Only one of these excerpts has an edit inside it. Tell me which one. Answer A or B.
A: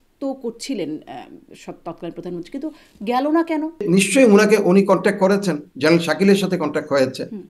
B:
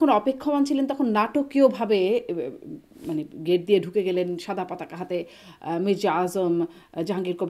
A